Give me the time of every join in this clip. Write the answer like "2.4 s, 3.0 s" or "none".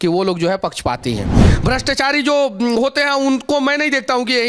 1.4 s